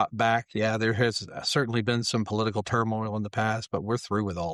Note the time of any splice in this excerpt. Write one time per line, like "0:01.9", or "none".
none